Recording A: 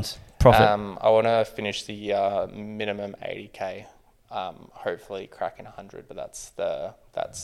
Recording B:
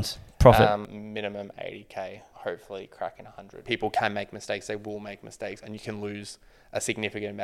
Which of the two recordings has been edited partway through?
B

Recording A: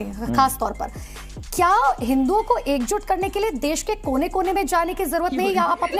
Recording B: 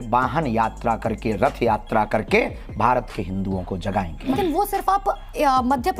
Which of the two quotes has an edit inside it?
B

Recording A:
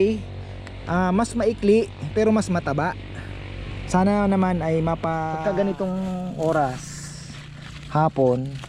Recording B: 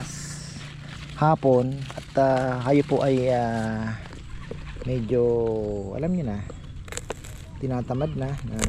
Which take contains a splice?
A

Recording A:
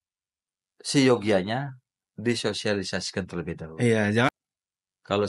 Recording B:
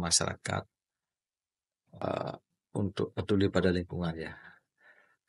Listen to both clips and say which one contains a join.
A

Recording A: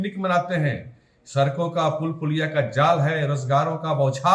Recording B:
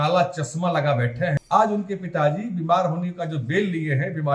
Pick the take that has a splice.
B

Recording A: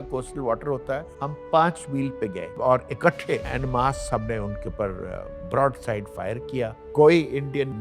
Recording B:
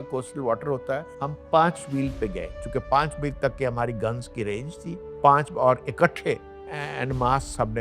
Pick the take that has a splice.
A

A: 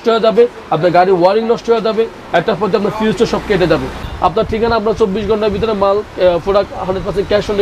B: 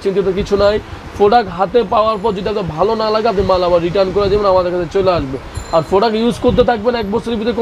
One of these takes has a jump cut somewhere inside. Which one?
A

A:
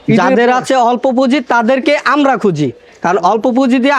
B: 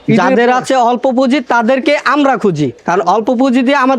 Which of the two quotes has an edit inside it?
B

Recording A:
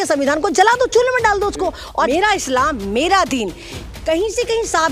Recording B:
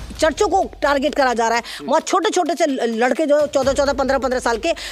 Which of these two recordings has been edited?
A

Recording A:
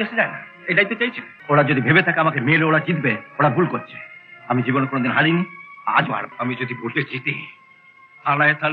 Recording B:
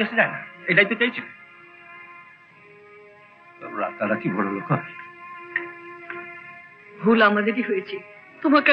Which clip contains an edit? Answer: A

